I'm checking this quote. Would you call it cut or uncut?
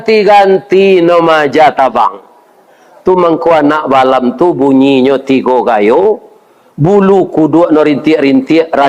uncut